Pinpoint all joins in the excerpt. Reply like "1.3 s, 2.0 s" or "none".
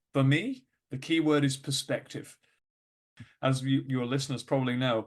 2.8 s